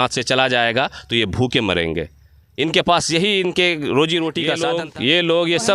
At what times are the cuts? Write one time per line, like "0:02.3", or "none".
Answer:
0:04.5